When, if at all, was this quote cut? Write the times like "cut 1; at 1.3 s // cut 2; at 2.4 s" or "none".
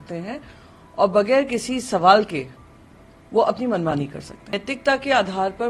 cut 1; at 4.6 s